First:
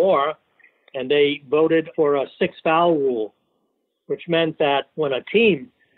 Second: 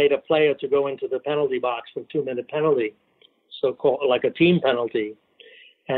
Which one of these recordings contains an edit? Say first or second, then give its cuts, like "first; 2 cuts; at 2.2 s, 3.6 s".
first; 2 cuts; at 1.9 s, 4.9 s